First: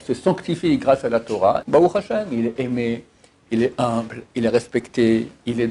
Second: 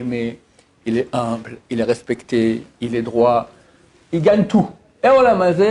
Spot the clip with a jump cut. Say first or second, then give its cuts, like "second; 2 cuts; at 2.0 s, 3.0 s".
first; 1 cut; at 1.6 s